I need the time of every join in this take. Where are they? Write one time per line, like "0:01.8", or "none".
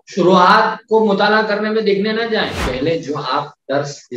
0:02.6